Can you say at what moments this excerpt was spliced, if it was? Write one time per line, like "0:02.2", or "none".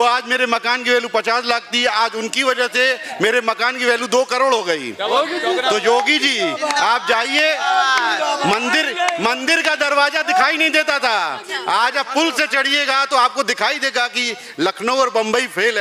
none